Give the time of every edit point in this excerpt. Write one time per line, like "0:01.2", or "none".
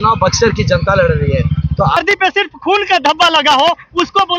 0:02.0